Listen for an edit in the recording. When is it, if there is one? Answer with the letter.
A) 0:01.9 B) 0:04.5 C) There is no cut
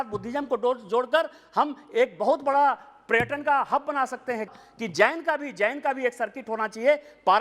B